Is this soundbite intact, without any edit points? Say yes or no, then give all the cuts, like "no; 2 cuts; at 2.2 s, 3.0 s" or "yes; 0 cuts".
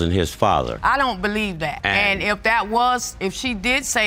yes; 0 cuts